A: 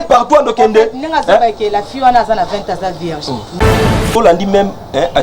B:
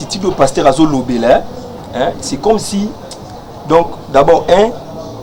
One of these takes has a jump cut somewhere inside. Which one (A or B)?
A